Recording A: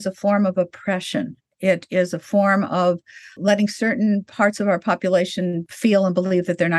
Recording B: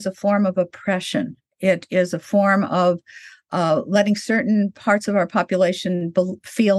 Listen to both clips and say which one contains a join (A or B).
A